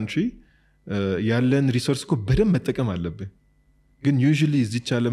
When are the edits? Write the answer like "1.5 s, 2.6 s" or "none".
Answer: none